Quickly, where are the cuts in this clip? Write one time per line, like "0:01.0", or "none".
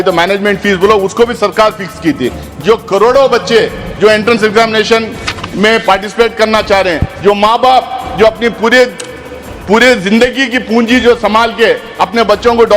0:02.5

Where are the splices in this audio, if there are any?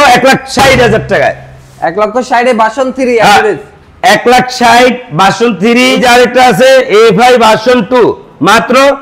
0:06.0

